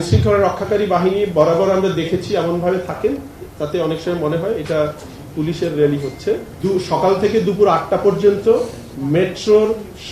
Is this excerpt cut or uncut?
cut